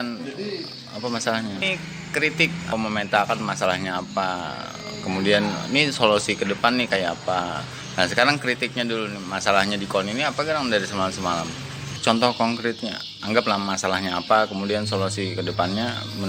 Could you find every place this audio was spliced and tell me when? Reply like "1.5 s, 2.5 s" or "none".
1.6 s, 2.7 s, 12.0 s